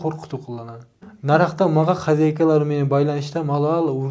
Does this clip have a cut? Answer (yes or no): no